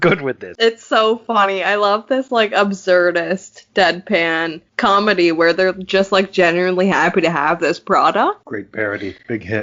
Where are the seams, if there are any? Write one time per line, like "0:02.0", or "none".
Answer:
0:08.4

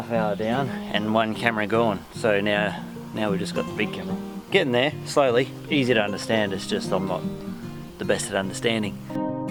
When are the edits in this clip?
none

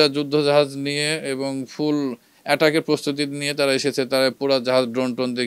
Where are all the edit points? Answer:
none

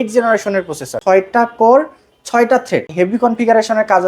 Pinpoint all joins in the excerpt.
0:00.9
0:02.9

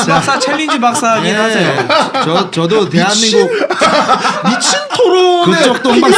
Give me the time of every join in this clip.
none

